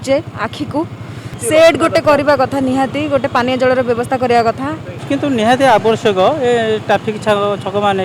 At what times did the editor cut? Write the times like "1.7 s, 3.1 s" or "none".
1.3 s, 5.0 s